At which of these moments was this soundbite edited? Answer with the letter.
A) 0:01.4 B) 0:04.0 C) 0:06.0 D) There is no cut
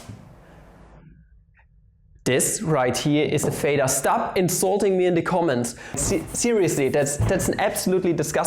C